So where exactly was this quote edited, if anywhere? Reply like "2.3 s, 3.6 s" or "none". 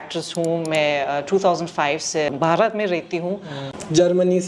2.3 s, 3.5 s